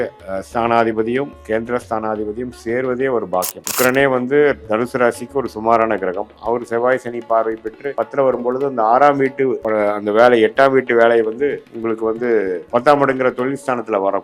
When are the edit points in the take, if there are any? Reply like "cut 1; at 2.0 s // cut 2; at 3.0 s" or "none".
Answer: cut 1; at 3.6 s // cut 2; at 7.8 s // cut 3; at 9.6 s // cut 4; at 11.7 s // cut 5; at 12.6 s